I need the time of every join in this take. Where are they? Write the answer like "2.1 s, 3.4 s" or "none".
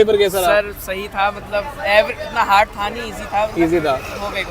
none